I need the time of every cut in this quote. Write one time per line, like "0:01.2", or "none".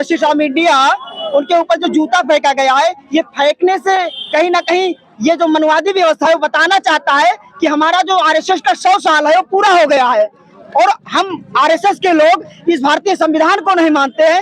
none

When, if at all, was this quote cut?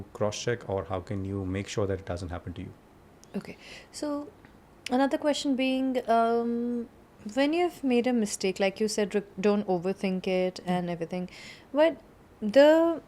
none

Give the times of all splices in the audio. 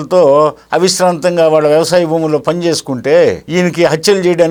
none

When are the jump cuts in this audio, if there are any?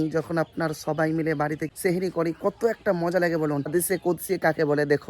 0:03.7

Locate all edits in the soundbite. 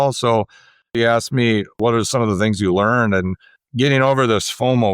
0:01.0
0:01.8
0:03.7

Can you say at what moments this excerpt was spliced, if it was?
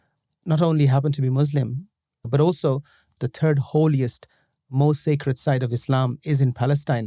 0:02.3
0:03.2

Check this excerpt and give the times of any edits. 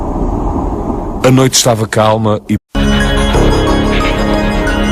none

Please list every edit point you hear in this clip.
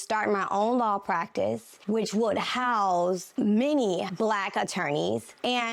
none

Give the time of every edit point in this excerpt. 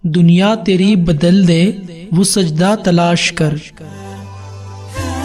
none

